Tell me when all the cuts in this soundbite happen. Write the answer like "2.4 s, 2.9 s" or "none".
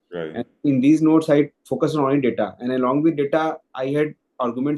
none